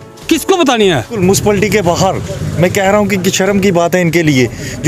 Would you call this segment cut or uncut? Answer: cut